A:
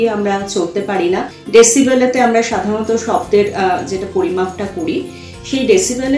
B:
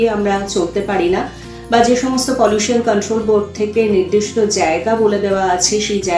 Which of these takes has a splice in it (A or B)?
A